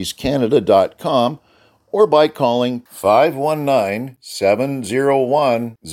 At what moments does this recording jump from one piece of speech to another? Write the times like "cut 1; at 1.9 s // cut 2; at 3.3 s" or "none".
none